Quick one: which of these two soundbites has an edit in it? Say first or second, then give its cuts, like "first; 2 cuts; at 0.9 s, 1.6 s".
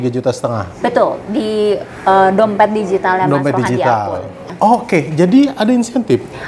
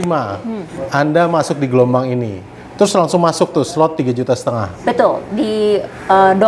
first; 1 cut; at 4.4 s